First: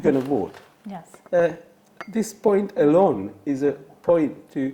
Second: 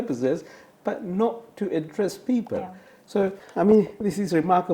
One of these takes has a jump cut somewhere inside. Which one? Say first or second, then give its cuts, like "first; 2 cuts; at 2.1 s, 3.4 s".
second; 1 cut; at 3.4 s